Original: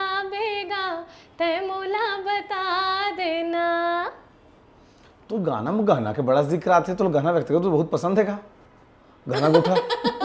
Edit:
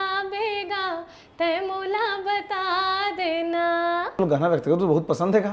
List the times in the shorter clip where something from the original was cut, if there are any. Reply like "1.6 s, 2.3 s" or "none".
4.2 s